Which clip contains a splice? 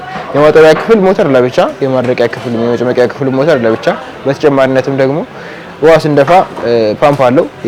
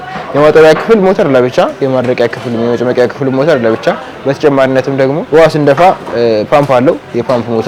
second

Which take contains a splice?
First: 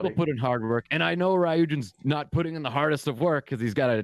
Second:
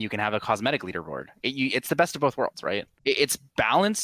second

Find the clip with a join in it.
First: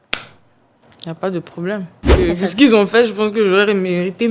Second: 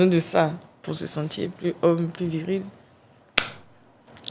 first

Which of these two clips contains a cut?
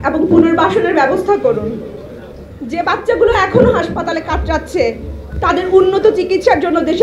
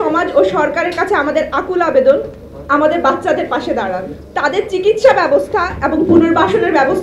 second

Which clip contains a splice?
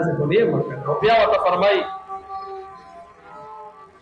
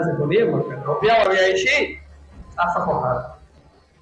second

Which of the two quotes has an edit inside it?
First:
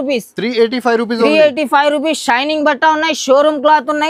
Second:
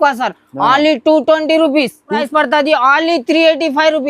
second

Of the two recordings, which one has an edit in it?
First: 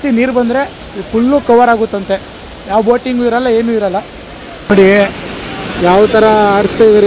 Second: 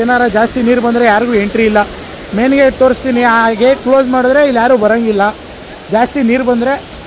first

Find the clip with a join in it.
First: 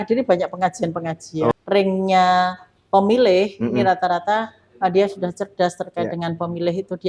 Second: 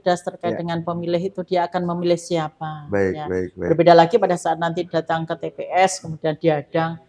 first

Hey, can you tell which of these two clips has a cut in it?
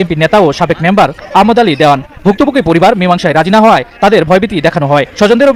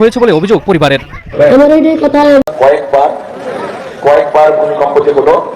second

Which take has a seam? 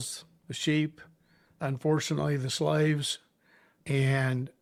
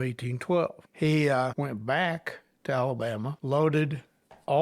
second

